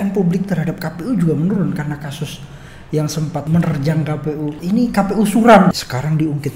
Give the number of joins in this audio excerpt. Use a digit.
3